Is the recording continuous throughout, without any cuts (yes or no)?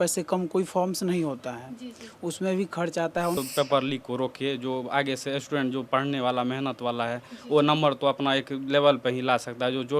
no